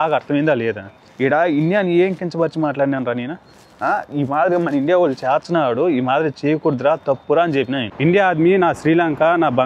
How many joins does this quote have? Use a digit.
1